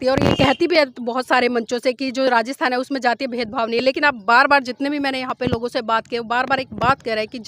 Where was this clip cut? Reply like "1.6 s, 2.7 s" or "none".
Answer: none